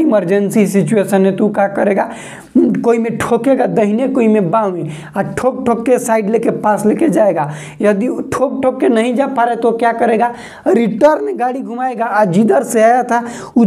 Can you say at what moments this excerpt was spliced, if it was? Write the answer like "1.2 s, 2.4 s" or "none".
none